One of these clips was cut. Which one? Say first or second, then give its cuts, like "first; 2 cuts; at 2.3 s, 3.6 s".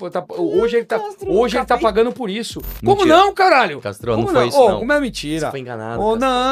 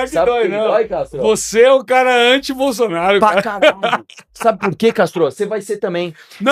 first; 1 cut; at 2.7 s